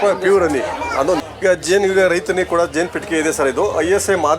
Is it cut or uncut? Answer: cut